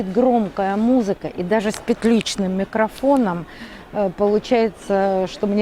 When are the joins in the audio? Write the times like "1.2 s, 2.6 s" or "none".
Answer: none